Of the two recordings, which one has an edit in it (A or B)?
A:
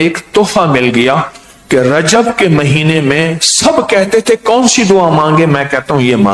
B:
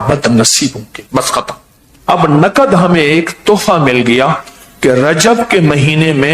B